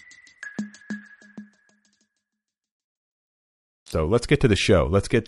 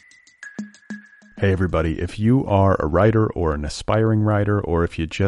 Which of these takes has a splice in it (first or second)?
second